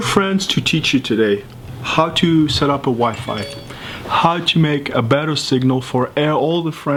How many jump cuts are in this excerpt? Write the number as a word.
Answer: zero